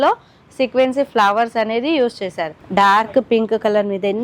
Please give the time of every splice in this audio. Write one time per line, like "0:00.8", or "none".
0:02.5